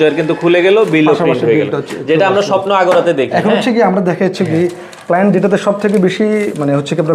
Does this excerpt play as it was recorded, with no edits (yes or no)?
yes